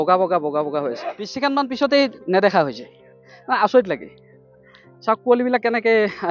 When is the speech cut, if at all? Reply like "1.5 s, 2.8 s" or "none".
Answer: 1.5 s

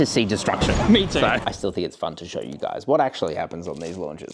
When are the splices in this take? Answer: 1.4 s

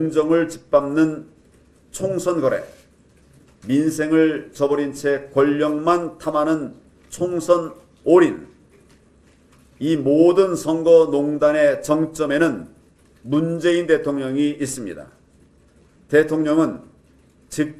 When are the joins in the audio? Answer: none

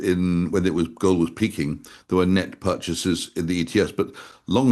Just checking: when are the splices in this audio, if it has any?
none

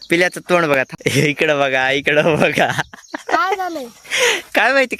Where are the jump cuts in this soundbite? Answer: 0.9 s

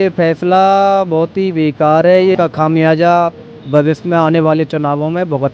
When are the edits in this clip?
2.4 s

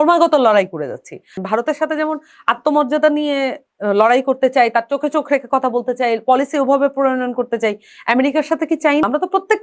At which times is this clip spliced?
1.3 s

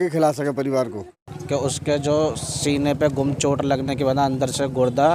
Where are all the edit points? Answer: 1.3 s

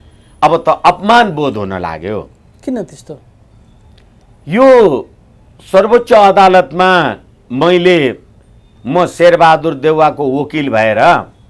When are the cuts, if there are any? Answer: none

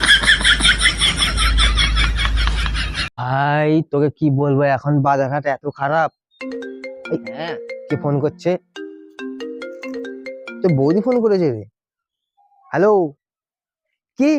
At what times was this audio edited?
3.1 s

